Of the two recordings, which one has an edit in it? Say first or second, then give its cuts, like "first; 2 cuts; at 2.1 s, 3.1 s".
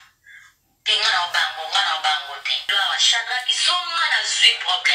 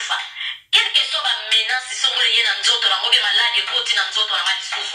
first; 1 cut; at 2.6 s